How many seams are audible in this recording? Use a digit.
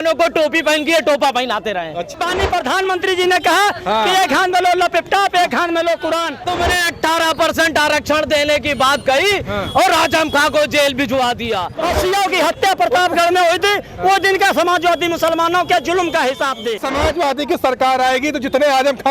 4